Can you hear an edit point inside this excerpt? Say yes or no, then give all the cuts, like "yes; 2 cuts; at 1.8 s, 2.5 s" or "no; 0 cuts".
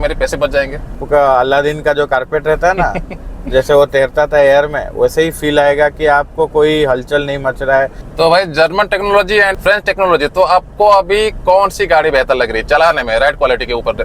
yes; 2 cuts; at 1.0 s, 8.0 s